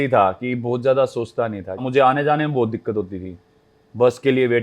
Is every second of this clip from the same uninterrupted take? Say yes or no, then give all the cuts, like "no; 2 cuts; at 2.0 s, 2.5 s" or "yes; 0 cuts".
no; 1 cut; at 1.7 s